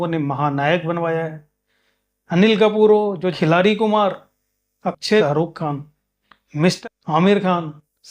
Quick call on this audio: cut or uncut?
cut